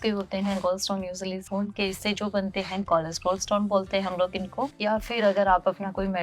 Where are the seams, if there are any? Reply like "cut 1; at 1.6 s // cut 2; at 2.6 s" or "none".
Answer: cut 1; at 1.4 s // cut 2; at 4.7 s